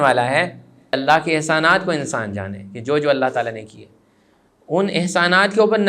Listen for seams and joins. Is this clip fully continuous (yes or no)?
no